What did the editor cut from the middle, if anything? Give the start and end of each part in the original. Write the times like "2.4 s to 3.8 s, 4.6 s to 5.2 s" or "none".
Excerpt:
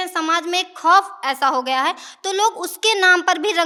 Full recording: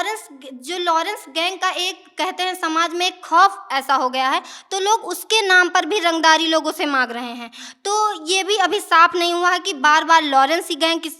none